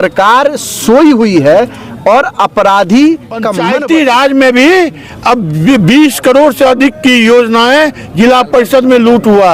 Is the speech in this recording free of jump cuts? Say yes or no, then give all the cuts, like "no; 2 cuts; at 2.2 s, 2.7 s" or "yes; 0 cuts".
no; 1 cut; at 3.6 s